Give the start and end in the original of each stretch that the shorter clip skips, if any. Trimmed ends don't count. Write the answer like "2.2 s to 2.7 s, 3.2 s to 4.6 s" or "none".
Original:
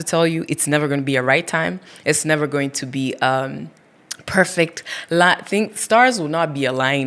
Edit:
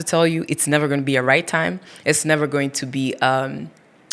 none